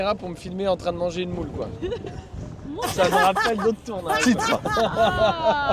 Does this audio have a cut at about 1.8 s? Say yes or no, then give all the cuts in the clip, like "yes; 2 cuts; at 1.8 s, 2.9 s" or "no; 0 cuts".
yes; 1 cut; at 1.8 s